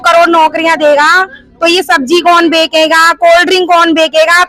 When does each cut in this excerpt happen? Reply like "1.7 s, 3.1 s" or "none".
none